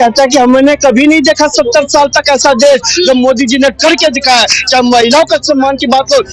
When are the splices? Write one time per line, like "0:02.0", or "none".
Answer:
none